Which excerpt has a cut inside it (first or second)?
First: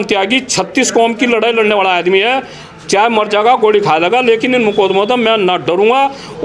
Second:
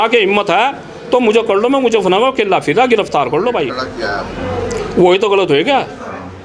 second